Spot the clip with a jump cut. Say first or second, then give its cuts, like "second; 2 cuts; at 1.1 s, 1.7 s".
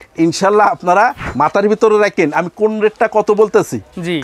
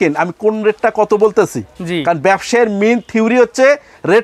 first; 1 cut; at 1.3 s